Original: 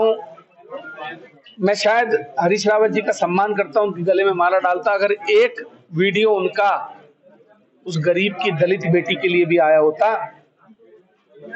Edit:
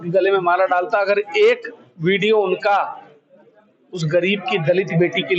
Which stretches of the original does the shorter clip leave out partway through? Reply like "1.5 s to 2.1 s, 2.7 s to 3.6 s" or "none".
none